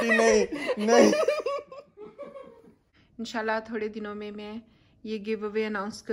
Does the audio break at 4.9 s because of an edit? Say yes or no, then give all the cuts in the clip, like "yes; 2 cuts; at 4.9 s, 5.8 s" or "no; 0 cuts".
no; 1 cut; at 3.0 s